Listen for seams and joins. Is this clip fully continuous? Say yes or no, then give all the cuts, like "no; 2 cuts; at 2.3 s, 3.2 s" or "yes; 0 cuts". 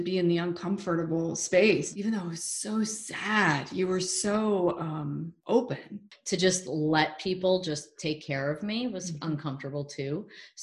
no; 3 cuts; at 1.9 s, 5.3 s, 6.1 s